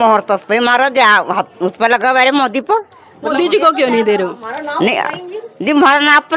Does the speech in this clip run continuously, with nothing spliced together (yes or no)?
no